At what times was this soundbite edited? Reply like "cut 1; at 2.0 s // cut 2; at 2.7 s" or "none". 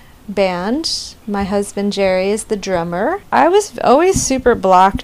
cut 1; at 3.2 s

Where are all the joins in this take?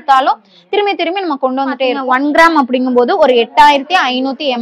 cut 1; at 2.0 s

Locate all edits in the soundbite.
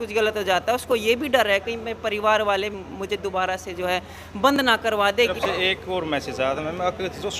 cut 1; at 5.3 s

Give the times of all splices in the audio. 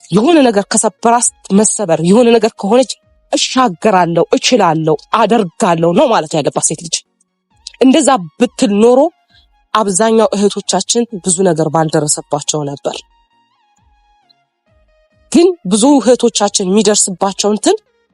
none

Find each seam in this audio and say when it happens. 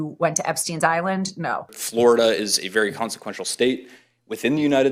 cut 1; at 1.8 s

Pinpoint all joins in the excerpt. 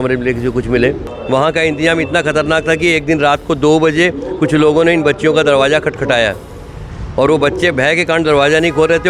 cut 1; at 1.1 s

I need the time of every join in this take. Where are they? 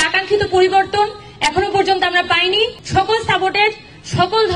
cut 1; at 2.8 s

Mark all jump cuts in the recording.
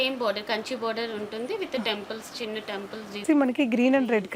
cut 1; at 3.2 s

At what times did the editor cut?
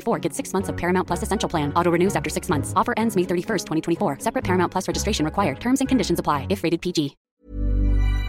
cut 1; at 7.3 s

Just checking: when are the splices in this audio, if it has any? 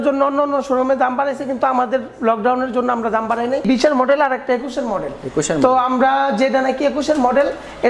cut 1; at 3.6 s

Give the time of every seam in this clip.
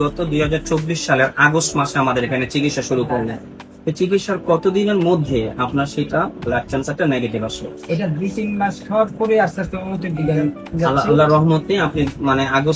none

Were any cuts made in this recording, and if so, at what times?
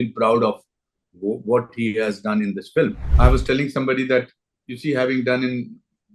cut 1; at 3.0 s

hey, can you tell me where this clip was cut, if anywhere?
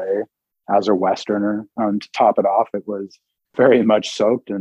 cut 1; at 1.7 s // cut 2; at 3.4 s

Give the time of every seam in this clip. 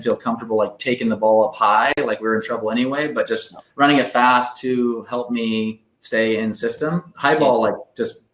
cut 1; at 3.6 s

